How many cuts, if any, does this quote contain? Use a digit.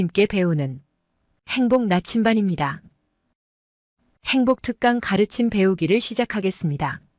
0